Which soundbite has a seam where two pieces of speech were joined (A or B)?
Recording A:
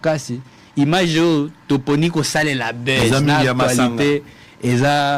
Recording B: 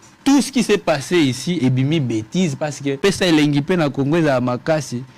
B